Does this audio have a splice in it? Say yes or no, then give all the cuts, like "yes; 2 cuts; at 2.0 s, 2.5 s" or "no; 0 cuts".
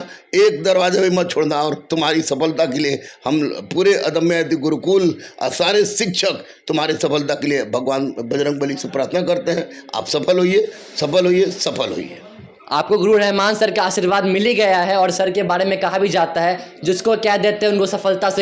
no; 0 cuts